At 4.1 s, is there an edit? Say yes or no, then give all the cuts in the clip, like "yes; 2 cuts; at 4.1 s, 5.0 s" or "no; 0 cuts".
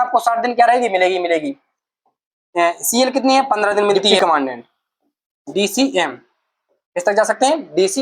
yes; 1 cut; at 4.1 s